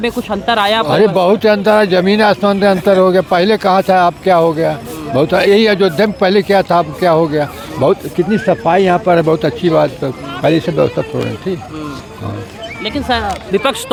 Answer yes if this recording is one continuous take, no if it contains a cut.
yes